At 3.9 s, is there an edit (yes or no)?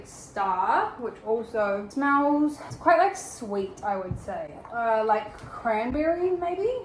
no